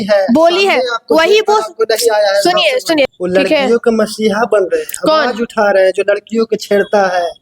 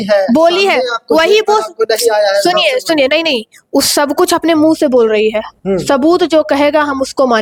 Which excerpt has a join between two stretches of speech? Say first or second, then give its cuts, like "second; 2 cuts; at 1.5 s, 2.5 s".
first; 1 cut; at 3.1 s